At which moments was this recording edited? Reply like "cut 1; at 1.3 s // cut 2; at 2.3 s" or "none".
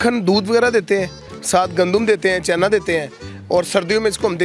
none